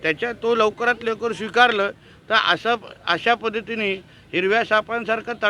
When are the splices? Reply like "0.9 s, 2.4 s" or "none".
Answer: none